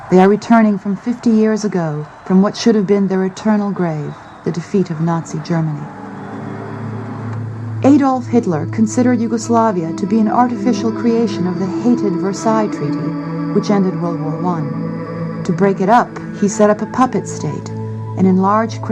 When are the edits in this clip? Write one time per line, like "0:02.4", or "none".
0:01.6
0:15.7